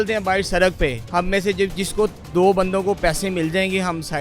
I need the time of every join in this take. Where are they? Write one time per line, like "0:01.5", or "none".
0:01.0
0:02.2